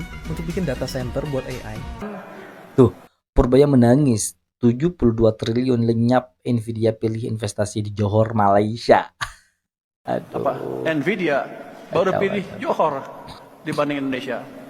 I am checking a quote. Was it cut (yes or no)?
yes